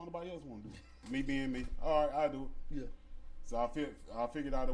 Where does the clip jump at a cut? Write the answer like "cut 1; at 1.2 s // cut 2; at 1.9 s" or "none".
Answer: cut 1; at 0.9 s